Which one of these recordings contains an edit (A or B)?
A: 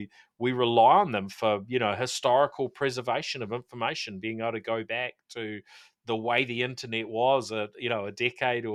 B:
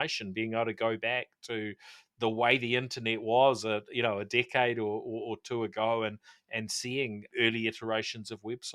B